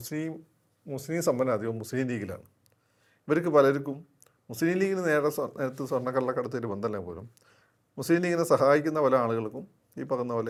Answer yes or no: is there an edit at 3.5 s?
no